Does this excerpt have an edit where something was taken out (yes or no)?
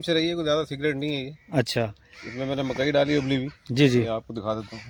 no